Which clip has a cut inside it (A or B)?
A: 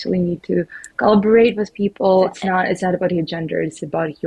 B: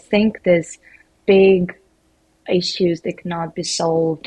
A